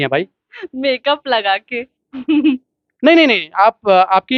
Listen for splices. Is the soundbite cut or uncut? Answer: uncut